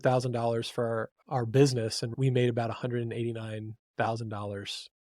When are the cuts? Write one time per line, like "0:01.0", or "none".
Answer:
0:01.2